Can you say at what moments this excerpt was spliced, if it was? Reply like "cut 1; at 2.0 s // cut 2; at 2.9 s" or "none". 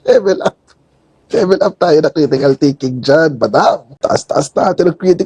cut 1; at 3.9 s